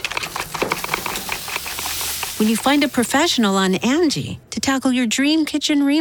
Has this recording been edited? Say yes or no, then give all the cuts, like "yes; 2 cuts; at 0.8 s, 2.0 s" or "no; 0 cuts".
no; 0 cuts